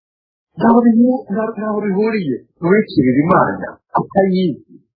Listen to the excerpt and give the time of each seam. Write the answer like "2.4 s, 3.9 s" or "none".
3.7 s